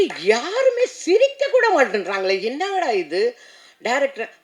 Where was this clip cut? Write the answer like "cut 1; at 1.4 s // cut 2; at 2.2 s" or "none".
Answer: none